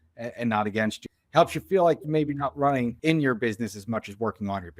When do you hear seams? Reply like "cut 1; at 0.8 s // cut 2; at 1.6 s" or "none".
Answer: cut 1; at 1.0 s // cut 2; at 3.0 s